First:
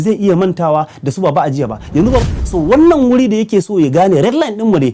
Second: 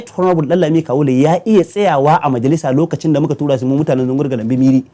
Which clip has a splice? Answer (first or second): first